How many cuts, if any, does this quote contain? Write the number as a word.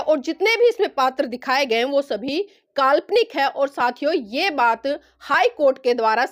zero